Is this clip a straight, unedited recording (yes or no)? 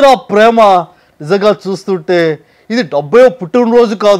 yes